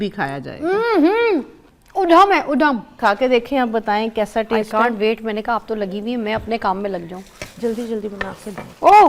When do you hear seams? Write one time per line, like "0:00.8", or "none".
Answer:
0:02.9